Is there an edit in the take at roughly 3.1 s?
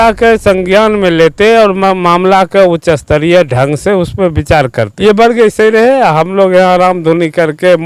no; 1 cut; at 4.9 s

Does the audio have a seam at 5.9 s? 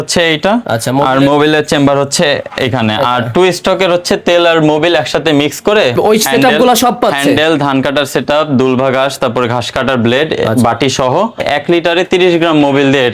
yes; 2 cuts; at 5.9 s, 11.4 s

